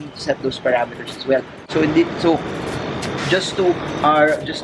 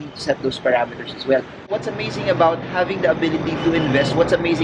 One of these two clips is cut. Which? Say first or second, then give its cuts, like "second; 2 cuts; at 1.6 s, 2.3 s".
second; 1 cut; at 1.7 s